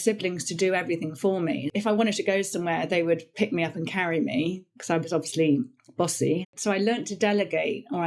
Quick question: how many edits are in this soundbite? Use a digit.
2